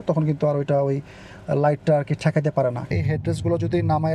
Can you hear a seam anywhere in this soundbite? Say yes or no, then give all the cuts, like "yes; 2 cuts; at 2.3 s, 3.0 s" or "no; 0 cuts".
yes; 1 cut; at 2.9 s